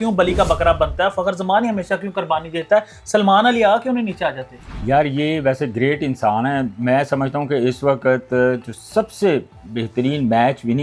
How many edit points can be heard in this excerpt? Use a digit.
0